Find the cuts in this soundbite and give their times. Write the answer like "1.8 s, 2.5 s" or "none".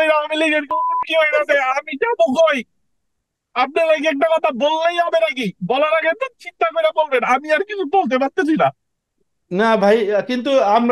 none